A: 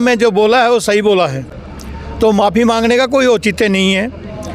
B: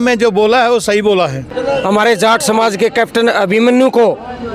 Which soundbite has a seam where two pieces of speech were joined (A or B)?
B